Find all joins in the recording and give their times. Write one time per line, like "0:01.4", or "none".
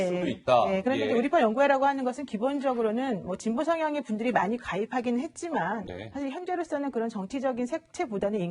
0:03.3